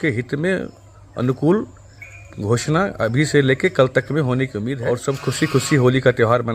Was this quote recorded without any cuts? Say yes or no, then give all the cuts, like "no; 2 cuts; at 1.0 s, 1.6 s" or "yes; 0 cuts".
no; 1 cut; at 4.7 s